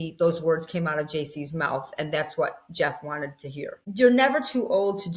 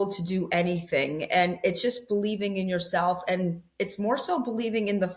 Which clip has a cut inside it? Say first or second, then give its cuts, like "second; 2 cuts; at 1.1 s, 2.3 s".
first; 1 cut; at 3.8 s